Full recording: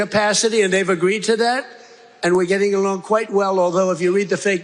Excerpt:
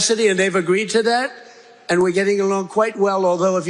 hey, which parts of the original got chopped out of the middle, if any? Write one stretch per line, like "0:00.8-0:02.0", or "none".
none